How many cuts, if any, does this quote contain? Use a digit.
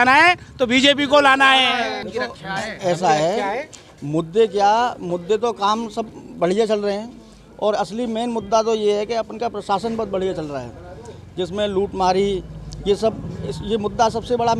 1